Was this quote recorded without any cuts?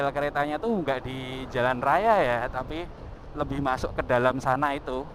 yes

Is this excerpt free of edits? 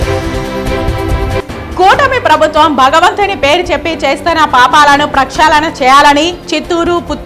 no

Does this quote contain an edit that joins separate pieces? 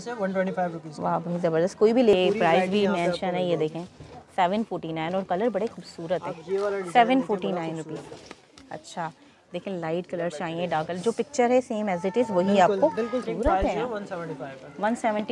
yes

